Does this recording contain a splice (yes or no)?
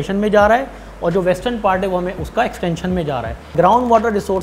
yes